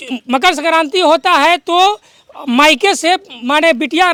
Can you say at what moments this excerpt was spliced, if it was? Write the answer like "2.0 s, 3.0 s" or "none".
none